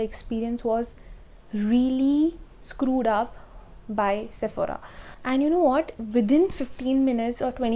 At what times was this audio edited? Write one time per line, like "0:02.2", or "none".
none